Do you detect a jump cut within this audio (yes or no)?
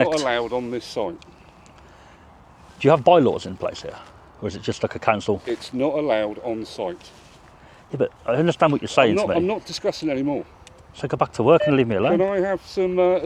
no